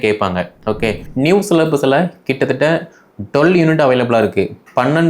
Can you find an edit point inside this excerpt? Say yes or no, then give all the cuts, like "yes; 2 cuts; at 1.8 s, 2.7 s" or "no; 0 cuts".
yes; 1 cut; at 1.0 s